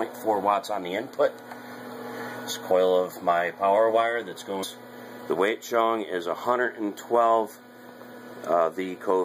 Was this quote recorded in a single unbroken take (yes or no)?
yes